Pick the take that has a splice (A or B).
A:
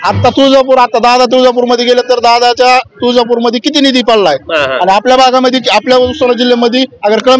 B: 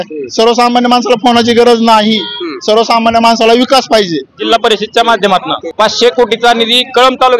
B